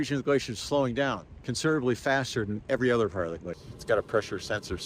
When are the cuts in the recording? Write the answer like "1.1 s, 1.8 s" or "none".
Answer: 3.6 s